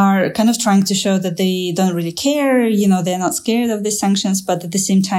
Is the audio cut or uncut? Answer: uncut